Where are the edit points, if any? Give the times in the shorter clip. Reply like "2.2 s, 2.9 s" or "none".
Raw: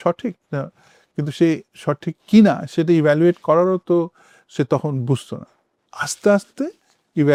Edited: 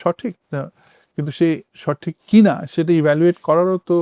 none

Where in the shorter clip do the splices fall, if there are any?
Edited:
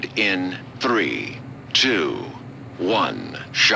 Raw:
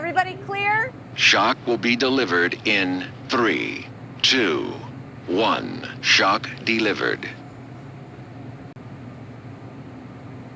none

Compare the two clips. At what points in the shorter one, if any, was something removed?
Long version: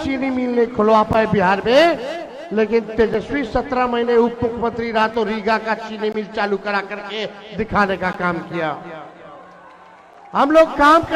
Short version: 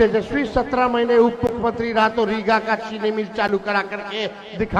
none

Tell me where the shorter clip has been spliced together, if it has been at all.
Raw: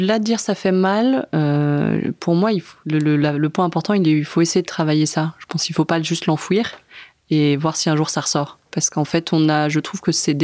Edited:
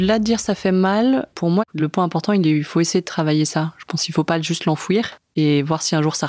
1.7 s, 5.2 s

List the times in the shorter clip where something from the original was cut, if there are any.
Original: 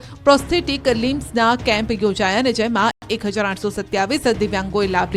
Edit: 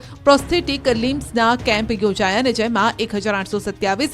3.0 s

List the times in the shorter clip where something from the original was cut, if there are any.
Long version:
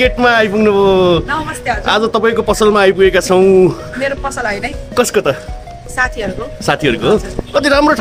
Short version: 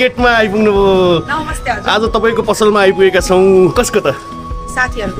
3.7 s

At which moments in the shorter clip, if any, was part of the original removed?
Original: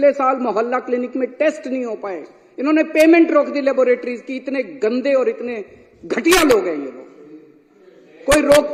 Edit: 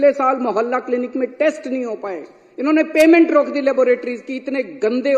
none

